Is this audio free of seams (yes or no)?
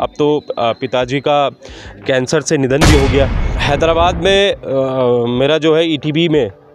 no